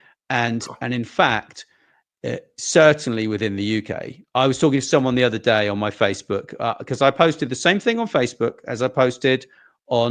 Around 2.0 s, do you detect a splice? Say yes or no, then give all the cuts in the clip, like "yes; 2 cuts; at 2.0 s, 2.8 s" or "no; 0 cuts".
no; 0 cuts